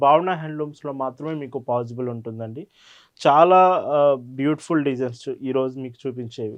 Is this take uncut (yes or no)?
yes